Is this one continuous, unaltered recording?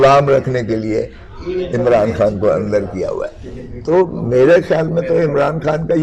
yes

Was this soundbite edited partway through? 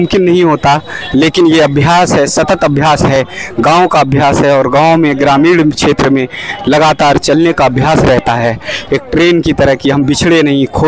no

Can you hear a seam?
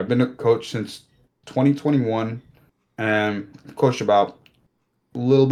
no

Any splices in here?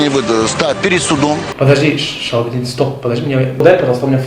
yes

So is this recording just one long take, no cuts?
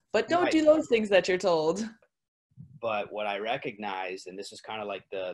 no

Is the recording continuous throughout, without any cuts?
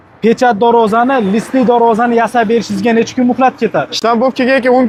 yes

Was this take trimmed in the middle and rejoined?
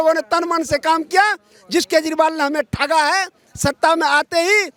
no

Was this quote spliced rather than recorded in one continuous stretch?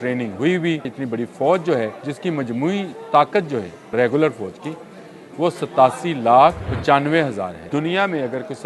yes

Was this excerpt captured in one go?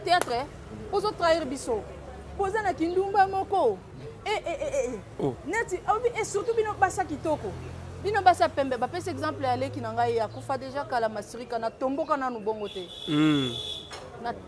yes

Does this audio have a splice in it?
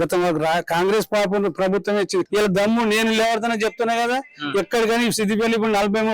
yes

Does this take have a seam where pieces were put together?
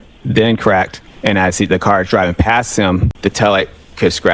yes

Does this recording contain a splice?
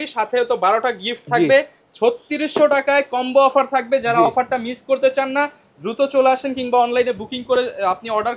no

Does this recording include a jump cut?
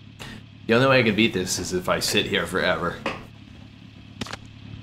yes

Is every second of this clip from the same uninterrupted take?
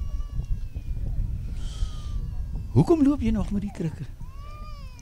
yes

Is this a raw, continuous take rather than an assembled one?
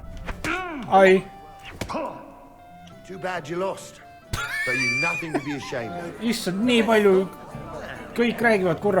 no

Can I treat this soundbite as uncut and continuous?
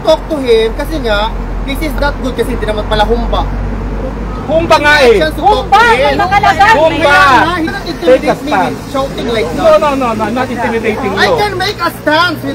no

